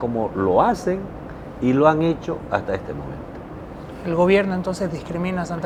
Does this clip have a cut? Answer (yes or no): no